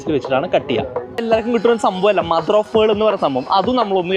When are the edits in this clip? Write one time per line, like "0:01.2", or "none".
0:01.2